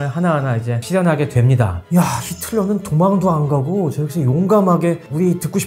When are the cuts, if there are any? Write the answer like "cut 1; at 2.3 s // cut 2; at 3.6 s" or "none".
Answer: cut 1; at 1.8 s